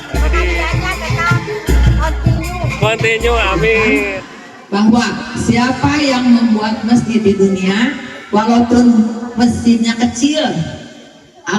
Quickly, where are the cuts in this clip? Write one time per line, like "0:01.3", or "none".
0:04.0